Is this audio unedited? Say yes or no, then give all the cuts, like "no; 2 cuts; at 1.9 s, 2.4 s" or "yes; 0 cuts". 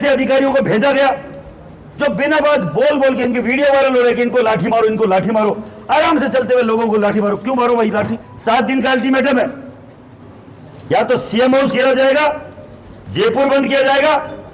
no; 1 cut; at 8.3 s